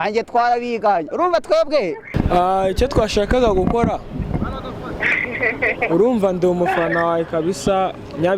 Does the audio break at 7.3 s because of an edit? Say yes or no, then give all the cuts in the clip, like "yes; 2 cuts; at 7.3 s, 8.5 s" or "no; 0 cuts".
no; 1 cut; at 2.1 s